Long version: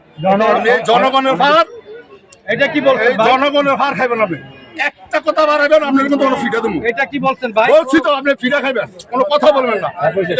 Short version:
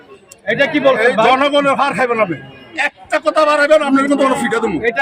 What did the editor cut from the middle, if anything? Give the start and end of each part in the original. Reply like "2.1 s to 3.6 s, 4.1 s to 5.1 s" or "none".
none